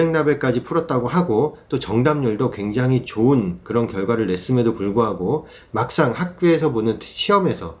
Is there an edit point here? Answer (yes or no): no